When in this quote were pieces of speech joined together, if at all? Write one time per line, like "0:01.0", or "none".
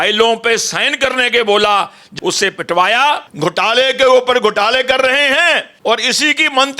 0:02.0
0:03.3
0:05.7